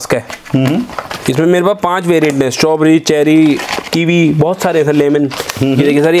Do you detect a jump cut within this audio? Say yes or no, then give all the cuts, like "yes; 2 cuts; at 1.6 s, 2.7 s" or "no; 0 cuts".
no; 0 cuts